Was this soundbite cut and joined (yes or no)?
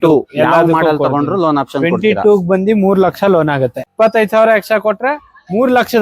yes